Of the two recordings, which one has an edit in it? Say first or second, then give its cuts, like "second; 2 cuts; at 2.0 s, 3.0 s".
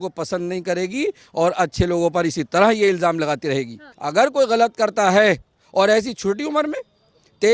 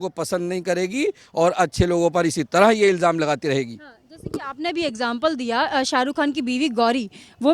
first; 1 cut; at 3.9 s